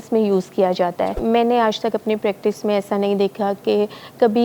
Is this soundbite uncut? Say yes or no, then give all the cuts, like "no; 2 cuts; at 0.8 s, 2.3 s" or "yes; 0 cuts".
no; 1 cut; at 1.2 s